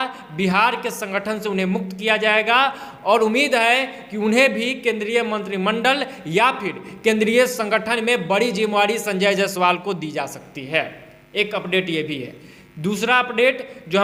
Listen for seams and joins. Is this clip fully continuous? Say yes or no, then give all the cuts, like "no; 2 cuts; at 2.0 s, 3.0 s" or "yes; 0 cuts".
yes; 0 cuts